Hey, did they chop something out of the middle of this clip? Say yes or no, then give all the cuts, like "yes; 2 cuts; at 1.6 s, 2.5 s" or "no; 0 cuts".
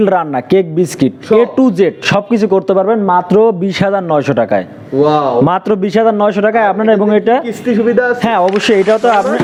no; 0 cuts